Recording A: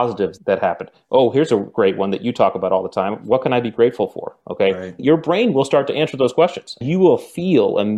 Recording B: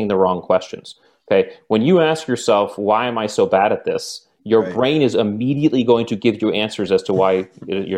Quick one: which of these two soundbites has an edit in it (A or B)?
A